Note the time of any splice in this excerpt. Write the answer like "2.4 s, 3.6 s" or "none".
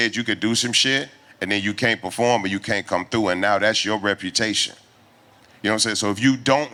none

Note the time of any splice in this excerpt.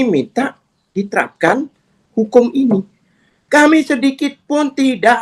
none

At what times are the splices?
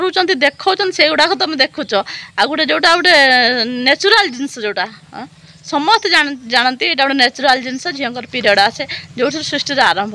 none

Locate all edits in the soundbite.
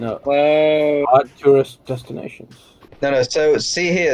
2.8 s

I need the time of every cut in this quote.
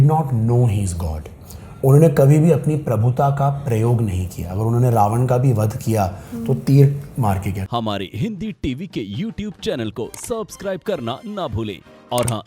7.6 s

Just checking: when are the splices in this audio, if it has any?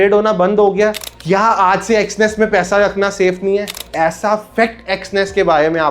1.1 s, 3.8 s

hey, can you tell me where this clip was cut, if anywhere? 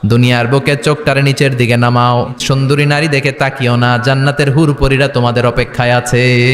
2.4 s

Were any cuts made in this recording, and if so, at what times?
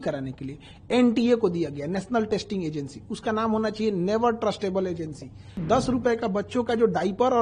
5.6 s

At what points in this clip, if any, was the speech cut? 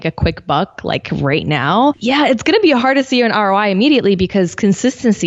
2.0 s

